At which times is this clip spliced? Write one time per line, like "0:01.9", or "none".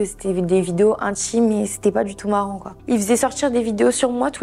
0:02.7